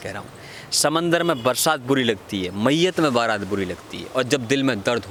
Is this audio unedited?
yes; 0 cuts

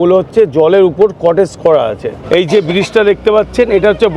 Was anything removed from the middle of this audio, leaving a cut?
yes; 1 cut; at 2.1 s

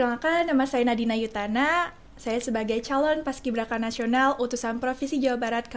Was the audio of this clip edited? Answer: no; 0 cuts

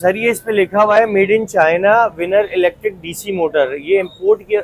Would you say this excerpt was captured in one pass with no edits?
yes; 0 cuts

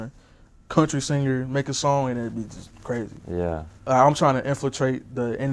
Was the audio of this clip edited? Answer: yes; 1 cut; at 3.7 s

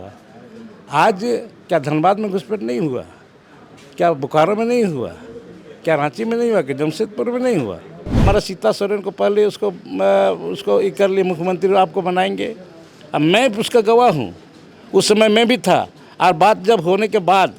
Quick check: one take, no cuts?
no; 1 cut; at 8.2 s

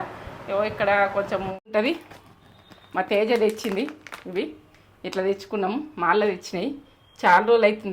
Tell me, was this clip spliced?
yes; 1 cut; at 1.7 s

